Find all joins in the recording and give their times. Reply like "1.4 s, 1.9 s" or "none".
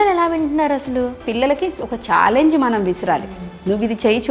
1.2 s